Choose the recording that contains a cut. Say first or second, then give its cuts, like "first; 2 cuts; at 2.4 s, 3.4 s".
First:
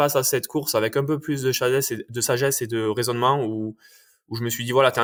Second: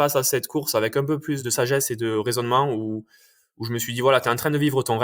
second; 1 cut; at 1.4 s